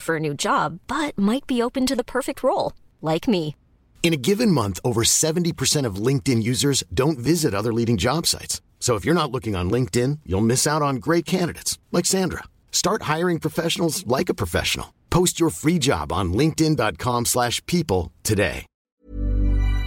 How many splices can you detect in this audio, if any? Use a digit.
1